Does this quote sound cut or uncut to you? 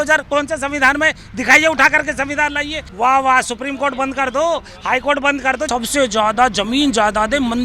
cut